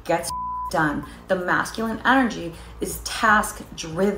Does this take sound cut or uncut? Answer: uncut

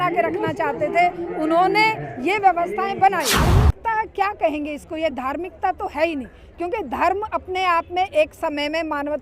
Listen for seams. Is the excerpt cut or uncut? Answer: cut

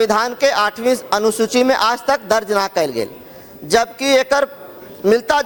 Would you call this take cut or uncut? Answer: uncut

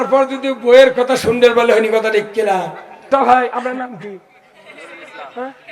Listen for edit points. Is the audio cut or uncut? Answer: cut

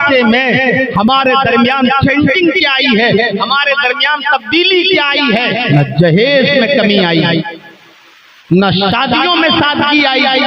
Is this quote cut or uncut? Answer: cut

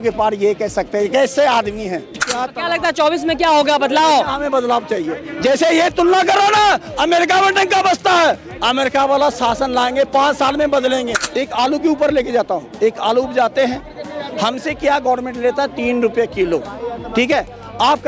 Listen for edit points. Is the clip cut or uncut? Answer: cut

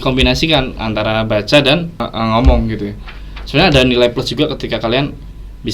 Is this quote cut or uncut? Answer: cut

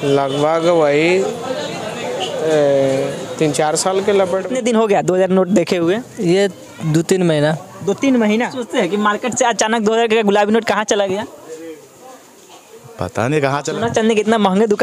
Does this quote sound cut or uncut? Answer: cut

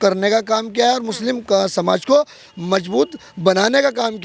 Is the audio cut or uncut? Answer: uncut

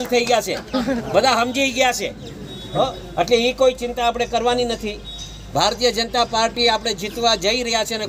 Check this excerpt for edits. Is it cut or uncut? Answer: uncut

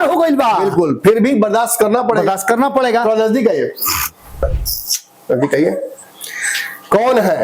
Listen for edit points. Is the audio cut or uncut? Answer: cut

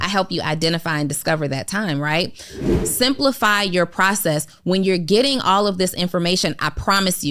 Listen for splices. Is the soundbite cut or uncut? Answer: cut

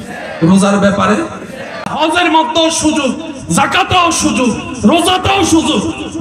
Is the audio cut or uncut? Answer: cut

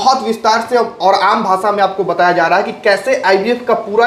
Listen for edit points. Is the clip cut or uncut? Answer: uncut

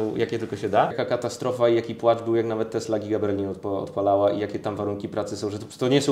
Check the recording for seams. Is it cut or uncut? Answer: cut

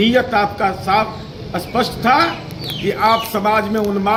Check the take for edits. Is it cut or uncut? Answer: uncut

